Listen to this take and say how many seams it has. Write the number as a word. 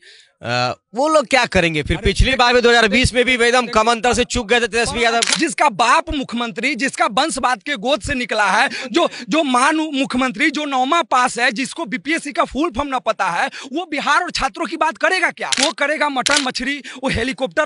two